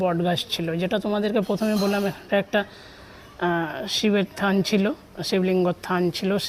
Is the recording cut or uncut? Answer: uncut